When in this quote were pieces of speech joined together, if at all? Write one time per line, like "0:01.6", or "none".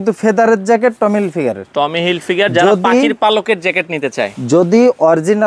none